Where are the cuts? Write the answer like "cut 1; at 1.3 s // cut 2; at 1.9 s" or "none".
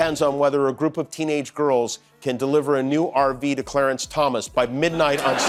none